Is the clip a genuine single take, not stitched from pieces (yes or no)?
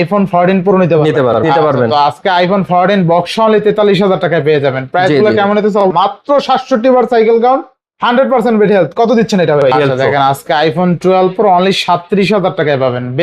no